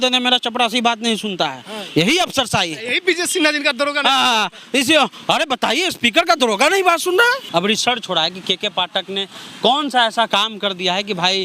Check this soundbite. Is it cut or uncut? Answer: cut